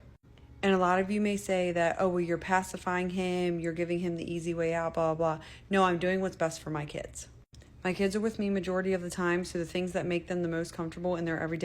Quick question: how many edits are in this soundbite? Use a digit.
2